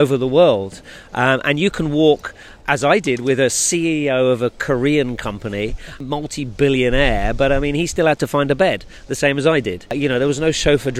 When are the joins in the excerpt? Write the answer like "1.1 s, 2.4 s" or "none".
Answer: 5.9 s, 10.0 s